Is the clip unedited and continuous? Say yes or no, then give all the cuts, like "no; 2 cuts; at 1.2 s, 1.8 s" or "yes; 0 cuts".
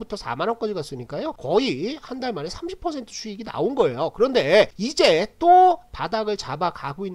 no; 2 cuts; at 1.4 s, 4.8 s